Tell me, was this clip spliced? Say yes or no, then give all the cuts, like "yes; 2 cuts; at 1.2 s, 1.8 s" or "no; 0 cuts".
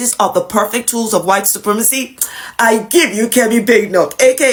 no; 0 cuts